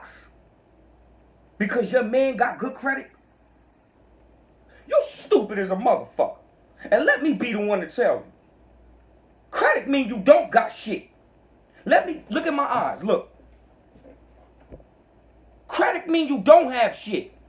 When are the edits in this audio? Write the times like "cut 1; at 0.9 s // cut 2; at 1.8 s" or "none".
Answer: none

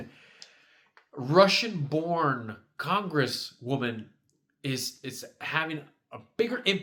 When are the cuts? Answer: none

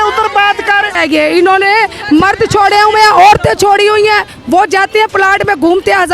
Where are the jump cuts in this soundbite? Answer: cut 1; at 0.9 s

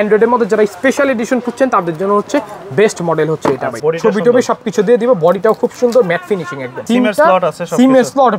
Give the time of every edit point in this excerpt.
cut 1; at 3.7 s // cut 2; at 6.8 s

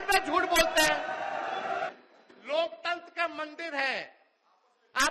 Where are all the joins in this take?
cut 1; at 1.9 s

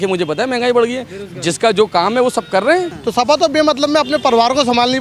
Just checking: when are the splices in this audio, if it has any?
cut 1; at 3.0 s

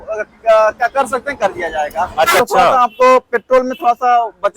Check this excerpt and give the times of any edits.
cut 1; at 2.4 s

